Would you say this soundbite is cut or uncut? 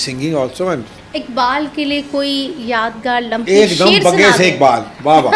cut